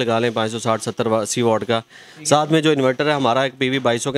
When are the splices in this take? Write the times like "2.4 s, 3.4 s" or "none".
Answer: none